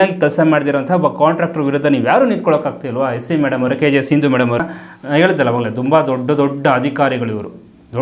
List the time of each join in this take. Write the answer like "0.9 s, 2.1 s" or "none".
4.6 s